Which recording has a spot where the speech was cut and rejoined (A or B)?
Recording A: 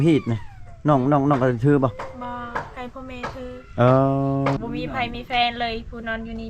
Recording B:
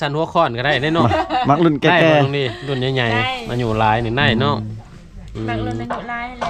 A